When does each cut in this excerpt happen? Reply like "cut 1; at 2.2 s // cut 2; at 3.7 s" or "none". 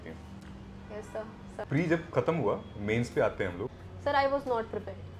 cut 1; at 1.6 s // cut 2; at 3.8 s